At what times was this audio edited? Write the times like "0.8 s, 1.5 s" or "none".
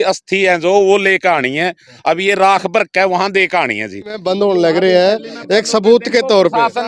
4.2 s